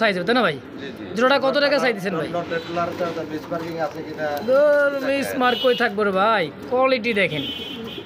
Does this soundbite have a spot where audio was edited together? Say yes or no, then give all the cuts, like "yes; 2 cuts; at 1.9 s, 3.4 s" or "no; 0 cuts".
no; 0 cuts